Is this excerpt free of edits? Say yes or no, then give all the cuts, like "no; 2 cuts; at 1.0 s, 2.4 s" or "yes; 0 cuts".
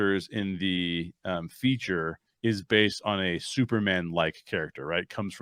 yes; 0 cuts